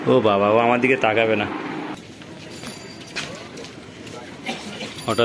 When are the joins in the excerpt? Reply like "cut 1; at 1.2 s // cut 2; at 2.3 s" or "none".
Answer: cut 1; at 1.9 s